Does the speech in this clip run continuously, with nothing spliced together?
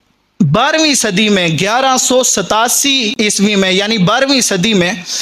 no; 1 cut; at 3.1 s

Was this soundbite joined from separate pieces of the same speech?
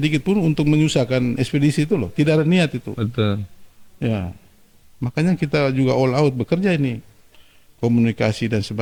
no; 0 cuts

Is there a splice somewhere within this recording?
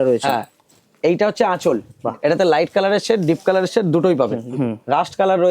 yes; 2 cuts; at 1.9 s, 4.4 s

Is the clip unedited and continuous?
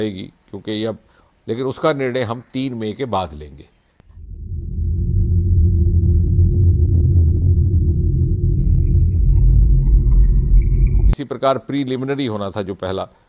yes; 0 cuts

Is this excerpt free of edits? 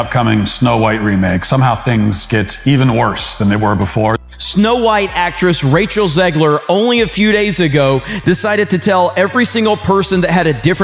no; 1 cut; at 4.2 s

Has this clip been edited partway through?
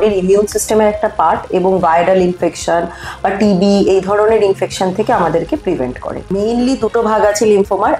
yes; 1 cut; at 6.3 s

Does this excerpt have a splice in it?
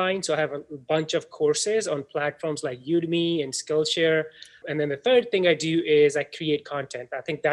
yes; 1 cut; at 4.6 s

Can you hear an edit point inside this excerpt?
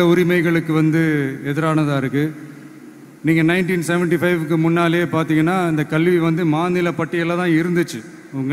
no; 0 cuts

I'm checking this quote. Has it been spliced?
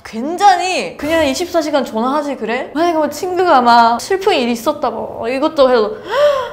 yes; 1 cut; at 2.6 s

